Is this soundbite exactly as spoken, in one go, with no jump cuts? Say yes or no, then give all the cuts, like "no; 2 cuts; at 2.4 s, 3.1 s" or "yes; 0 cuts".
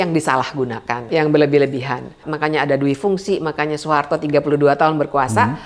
no; 2 cuts; at 1.0 s, 2.2 s